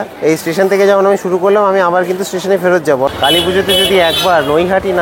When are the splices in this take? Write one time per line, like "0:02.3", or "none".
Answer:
0:03.1